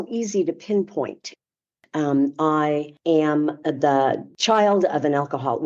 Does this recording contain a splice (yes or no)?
yes